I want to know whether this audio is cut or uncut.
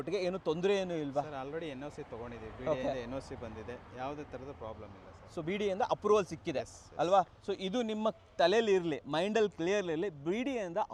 uncut